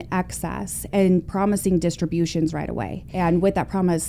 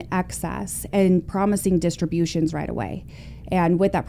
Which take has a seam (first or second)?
first